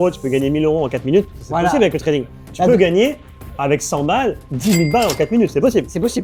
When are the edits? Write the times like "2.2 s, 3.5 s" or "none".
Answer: none